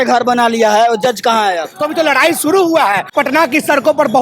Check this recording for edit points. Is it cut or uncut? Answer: cut